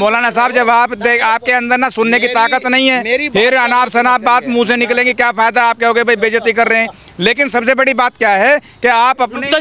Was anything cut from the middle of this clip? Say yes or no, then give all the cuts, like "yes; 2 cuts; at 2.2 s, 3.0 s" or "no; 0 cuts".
no; 0 cuts